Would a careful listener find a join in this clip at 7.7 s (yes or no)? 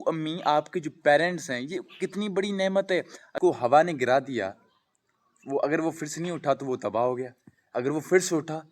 no